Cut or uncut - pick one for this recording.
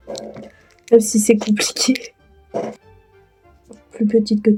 uncut